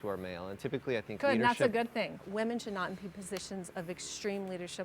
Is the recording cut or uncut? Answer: cut